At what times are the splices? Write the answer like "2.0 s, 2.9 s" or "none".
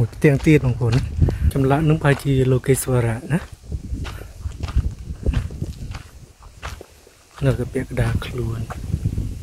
1.4 s